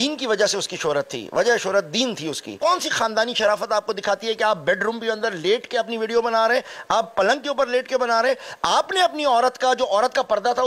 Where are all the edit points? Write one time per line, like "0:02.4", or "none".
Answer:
0:02.5